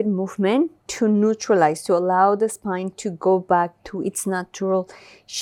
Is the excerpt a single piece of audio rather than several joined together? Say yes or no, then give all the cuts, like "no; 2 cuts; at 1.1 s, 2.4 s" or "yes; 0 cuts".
yes; 0 cuts